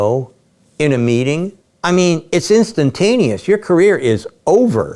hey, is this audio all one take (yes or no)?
yes